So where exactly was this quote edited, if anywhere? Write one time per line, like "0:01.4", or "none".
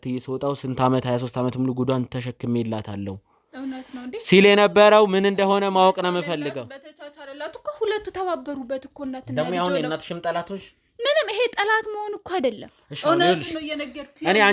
none